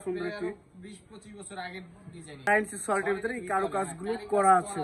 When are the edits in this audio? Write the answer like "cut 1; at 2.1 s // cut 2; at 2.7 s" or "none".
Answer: cut 1; at 2.5 s

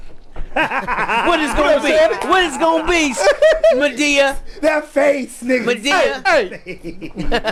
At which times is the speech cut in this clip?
none

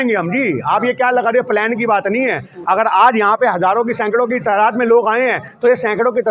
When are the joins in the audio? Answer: none

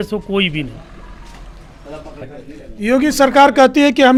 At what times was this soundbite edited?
none

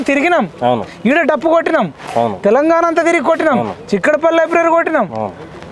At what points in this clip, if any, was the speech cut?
none

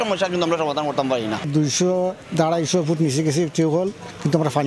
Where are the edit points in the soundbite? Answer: cut 1; at 1.4 s

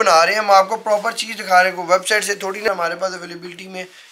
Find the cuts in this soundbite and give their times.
cut 1; at 2.7 s

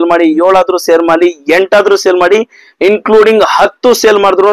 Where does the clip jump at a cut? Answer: none

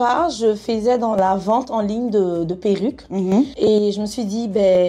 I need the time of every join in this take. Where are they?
none

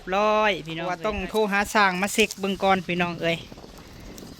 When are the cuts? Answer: cut 1; at 1.0 s

